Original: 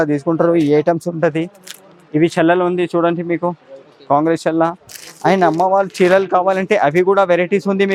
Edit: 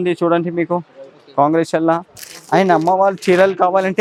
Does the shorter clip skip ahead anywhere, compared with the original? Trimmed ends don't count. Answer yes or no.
no